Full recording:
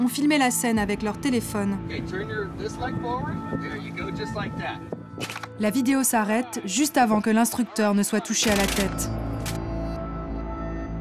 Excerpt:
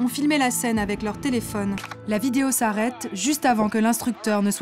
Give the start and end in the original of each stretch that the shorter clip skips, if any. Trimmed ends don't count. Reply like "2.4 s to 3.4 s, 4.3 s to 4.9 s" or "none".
1.9 s to 5.4 s